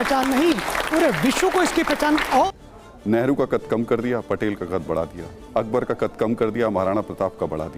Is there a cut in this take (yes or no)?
yes